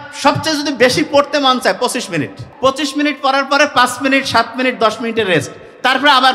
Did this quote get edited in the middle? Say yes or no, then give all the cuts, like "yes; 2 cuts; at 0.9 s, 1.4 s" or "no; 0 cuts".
yes; 1 cut; at 2.4 s